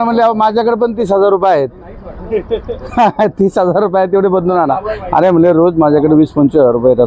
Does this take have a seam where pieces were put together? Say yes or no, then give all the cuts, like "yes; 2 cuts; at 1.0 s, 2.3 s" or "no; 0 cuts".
no; 0 cuts